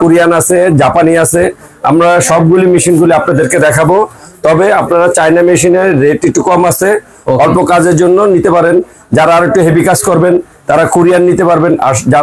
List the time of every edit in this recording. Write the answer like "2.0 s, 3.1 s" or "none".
none